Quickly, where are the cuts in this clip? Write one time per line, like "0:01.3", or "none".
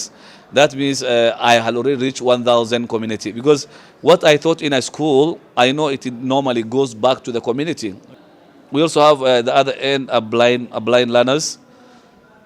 0:08.3